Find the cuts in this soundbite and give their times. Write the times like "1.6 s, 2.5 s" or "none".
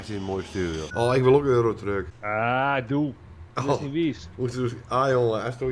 0.9 s, 2.2 s